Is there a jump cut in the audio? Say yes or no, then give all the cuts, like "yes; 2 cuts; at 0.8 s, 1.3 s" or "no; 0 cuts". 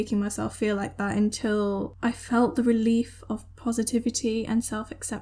yes; 1 cut; at 1.9 s